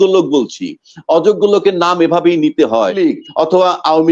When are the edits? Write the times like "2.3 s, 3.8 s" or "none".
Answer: 3.0 s